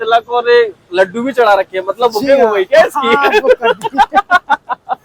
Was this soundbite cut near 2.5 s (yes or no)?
no